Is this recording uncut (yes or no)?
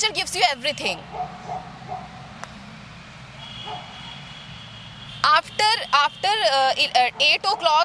yes